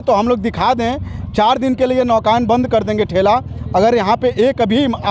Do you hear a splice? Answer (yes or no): no